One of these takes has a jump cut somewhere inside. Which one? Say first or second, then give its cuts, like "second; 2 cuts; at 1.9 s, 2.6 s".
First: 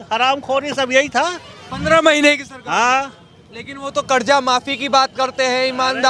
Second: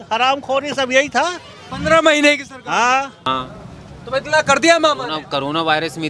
second; 1 cut; at 3.2 s